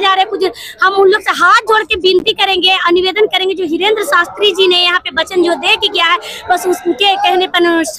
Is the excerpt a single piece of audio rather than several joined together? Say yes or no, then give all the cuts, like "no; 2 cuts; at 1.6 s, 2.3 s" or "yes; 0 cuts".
yes; 0 cuts